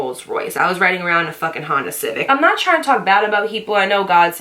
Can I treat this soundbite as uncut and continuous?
no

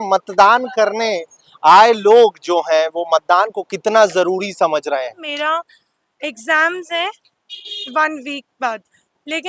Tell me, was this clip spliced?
yes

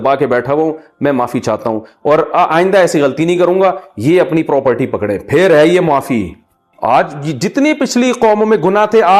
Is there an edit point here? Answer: yes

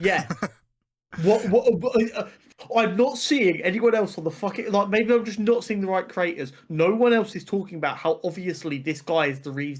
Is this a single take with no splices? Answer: yes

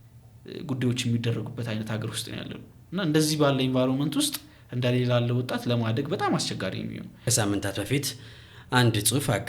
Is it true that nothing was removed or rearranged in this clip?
no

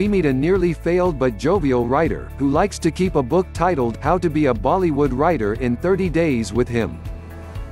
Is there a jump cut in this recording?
no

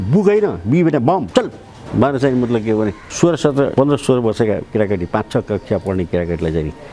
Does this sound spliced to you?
yes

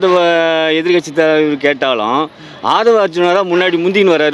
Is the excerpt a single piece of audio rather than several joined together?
yes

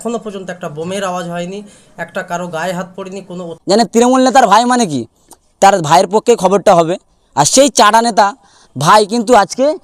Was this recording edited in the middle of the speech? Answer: yes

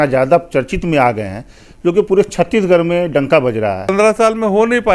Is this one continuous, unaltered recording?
no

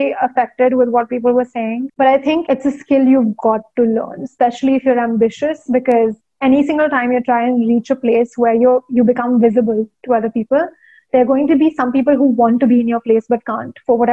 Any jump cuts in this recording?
no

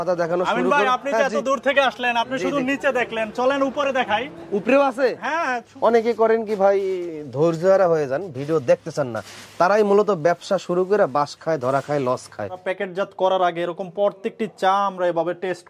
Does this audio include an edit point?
yes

